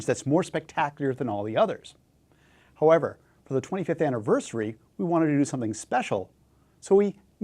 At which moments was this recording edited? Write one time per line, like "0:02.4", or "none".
0:04.6